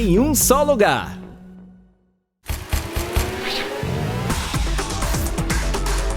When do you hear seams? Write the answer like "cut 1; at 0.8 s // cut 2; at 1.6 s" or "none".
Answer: cut 1; at 2.3 s